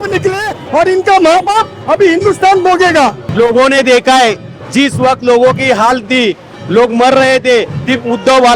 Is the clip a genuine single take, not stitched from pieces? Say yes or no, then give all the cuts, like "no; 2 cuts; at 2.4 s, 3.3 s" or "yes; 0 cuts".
no; 1 cut; at 3.2 s